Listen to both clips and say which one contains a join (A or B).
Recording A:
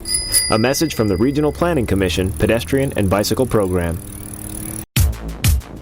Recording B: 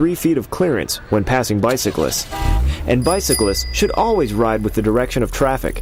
A